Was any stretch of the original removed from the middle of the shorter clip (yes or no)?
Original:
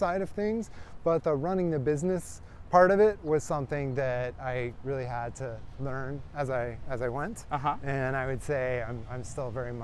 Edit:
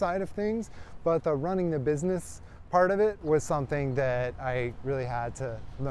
no